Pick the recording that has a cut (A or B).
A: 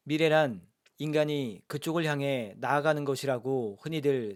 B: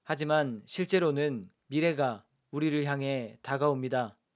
B